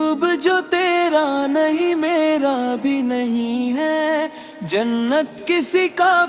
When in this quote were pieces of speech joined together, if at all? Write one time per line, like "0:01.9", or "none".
none